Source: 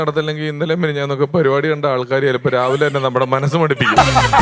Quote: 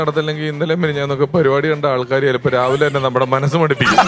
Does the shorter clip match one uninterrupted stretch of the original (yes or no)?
yes